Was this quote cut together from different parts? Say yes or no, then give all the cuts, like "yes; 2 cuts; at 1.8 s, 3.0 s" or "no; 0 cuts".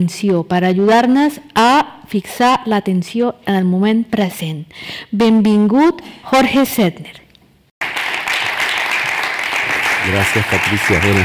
yes; 1 cut; at 3.5 s